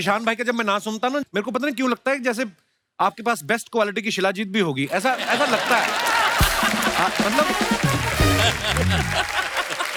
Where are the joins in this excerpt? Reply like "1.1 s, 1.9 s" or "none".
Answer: none